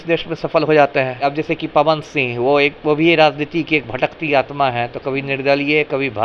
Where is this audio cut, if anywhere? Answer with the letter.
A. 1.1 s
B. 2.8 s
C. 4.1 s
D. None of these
A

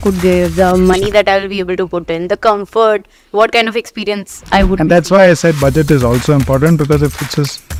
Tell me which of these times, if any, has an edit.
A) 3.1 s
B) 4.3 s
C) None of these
C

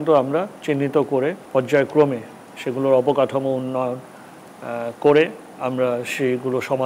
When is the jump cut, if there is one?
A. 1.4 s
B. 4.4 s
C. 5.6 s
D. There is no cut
A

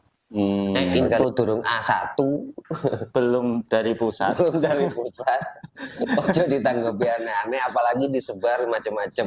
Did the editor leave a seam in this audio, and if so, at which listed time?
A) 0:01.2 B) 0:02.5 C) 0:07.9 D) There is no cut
A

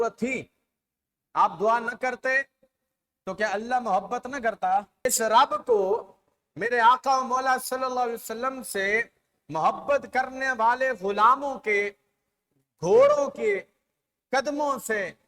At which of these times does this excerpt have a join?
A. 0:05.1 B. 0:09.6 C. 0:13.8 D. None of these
A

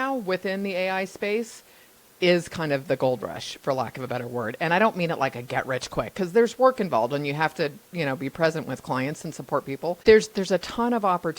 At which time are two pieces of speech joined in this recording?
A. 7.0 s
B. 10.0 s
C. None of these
B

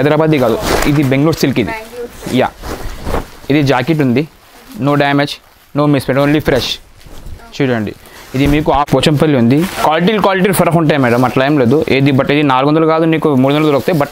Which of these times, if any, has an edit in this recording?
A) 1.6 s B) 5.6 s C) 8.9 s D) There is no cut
C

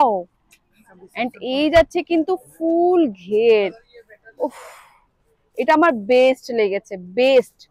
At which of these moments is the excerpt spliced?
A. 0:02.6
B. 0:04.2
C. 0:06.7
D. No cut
D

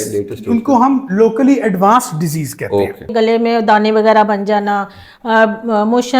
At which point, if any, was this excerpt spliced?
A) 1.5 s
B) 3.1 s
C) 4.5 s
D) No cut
B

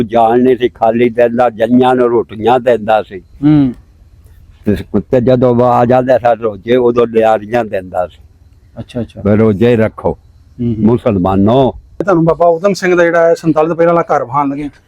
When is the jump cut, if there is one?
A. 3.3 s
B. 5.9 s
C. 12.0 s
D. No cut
C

